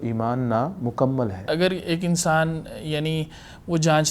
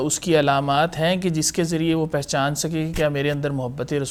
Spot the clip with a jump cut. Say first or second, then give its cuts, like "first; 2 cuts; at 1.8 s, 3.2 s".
first; 1 cut; at 1.4 s